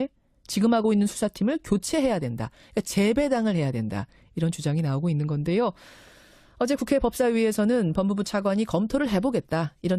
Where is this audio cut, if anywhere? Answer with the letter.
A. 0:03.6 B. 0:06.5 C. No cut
A